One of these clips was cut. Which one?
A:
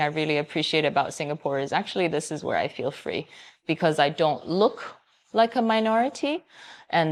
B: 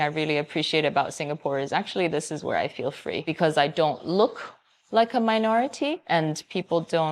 B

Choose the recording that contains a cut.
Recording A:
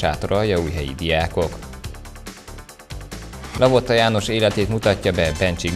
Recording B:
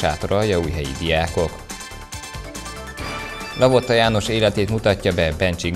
B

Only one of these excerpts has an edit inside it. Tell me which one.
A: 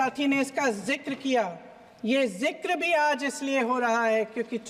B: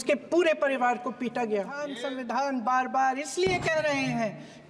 B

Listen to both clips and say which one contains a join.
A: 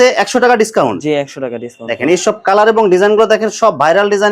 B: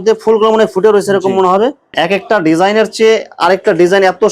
B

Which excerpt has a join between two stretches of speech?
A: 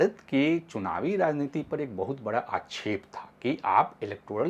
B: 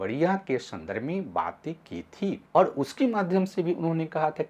B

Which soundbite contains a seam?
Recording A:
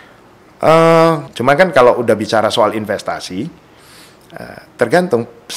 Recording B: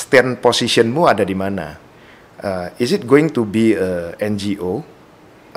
A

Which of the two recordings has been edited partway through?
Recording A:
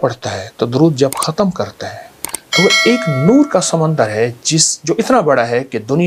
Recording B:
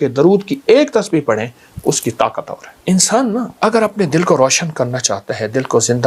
B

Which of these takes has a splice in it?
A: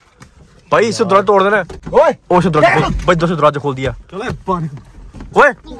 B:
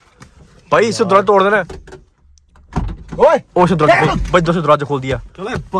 A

